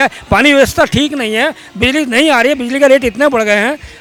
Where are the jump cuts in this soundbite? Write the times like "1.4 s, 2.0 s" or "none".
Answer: none

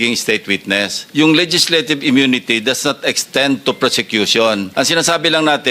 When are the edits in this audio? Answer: 1.0 s, 4.7 s

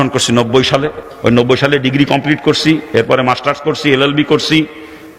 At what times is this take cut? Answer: 1.0 s

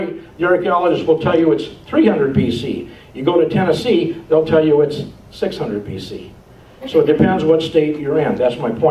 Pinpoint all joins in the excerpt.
1.6 s

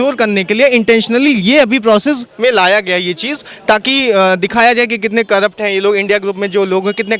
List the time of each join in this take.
none

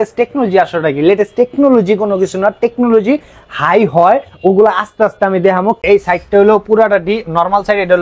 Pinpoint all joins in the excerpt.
5.8 s

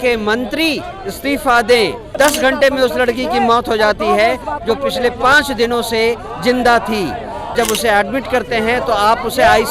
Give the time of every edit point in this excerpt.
2.1 s, 7.5 s

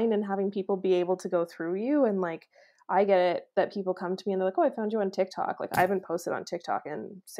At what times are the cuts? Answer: none

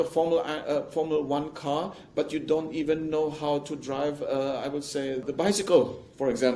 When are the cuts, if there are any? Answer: 5.2 s

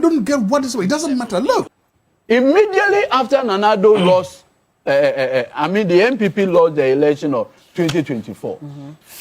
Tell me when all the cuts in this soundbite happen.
1.8 s

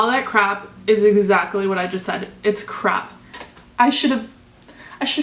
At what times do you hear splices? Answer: 3.4 s

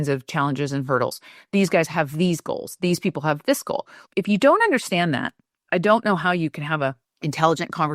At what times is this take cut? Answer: none

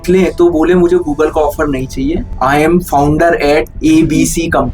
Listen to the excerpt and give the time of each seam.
2.3 s, 3.7 s

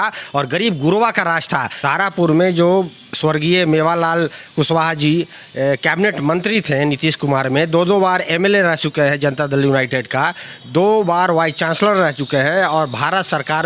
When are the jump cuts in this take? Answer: 1.8 s

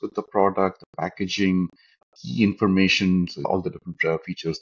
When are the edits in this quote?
3.4 s

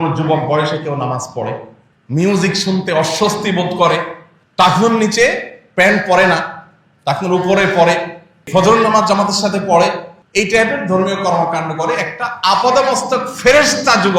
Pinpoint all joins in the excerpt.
10.1 s

